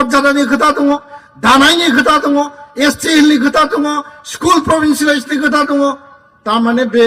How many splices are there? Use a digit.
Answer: 0